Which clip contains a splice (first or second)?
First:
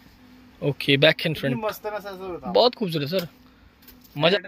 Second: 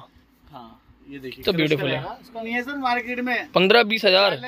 second